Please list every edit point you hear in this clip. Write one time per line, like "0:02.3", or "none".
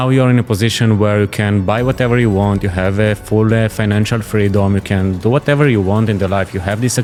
none